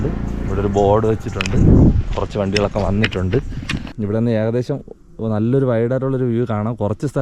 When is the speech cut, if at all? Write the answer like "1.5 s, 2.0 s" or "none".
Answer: 3.9 s